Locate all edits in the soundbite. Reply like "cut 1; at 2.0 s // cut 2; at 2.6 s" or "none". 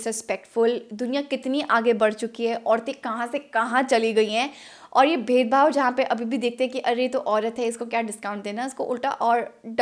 none